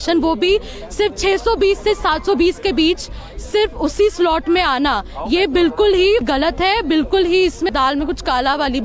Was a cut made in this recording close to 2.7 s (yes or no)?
no